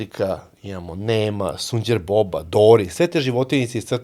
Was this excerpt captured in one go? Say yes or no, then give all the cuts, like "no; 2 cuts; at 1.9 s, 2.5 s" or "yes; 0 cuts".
yes; 0 cuts